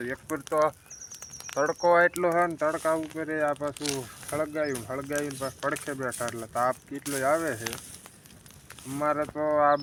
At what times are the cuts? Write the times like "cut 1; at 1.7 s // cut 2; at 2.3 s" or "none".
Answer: none